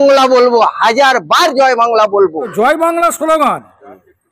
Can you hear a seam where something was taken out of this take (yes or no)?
no